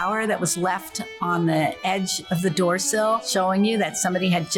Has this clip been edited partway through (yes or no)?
yes